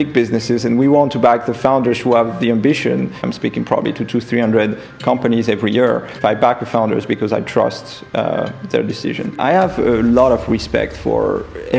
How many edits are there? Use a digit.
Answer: 3